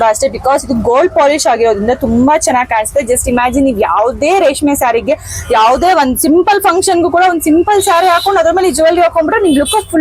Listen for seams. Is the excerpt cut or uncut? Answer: uncut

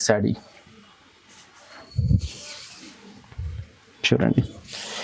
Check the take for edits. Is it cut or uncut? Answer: uncut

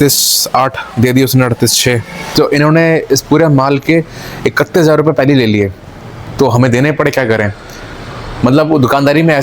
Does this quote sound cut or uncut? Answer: cut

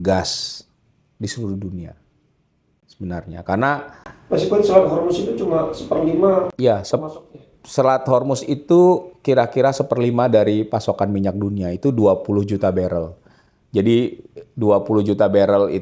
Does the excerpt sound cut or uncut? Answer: uncut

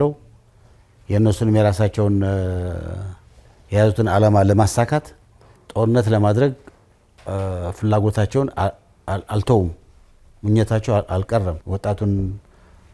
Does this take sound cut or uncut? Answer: cut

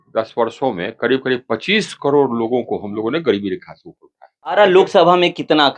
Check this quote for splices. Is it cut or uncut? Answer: cut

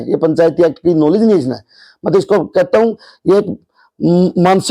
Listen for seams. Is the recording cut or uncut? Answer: uncut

